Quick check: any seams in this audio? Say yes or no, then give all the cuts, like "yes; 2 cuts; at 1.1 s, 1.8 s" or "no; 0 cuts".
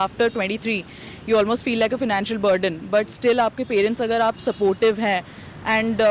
no; 0 cuts